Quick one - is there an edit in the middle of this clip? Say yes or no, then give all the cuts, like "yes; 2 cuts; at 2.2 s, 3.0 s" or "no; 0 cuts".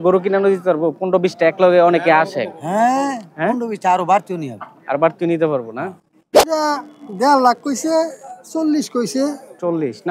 yes; 1 cut; at 6.5 s